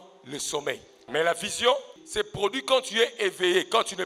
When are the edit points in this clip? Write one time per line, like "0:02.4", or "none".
0:01.1
0:02.0

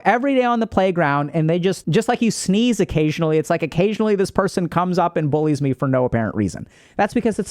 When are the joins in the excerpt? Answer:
0:01.8

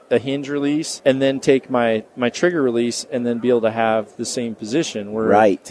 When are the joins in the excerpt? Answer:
0:00.9
0:02.1

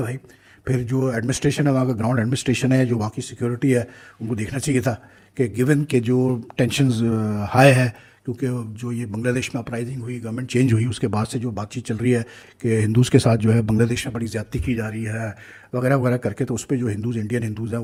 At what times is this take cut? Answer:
none

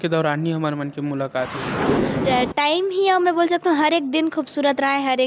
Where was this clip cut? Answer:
0:01.9

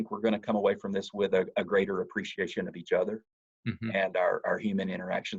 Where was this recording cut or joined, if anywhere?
none

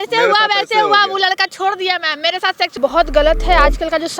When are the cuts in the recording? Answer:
0:02.7

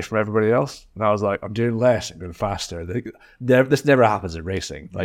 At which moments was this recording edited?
none

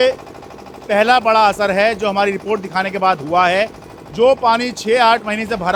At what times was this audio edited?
none

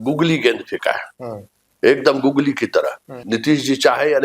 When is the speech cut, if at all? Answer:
0:03.1

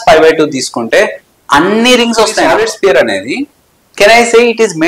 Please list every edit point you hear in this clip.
0:02.5

